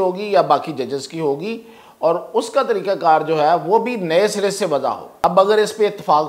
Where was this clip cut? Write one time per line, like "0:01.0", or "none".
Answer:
0:05.2